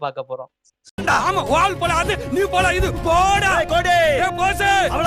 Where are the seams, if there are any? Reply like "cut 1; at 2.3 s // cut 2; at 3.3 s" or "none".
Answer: none